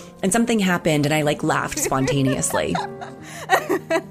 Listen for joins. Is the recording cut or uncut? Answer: cut